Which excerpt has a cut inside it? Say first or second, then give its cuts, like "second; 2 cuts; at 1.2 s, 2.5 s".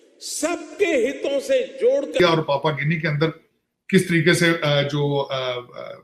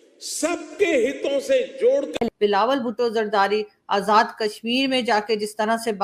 first; 1 cut; at 2.1 s